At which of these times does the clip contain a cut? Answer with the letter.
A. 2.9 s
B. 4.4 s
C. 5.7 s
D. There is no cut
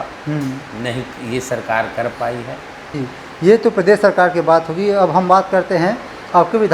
A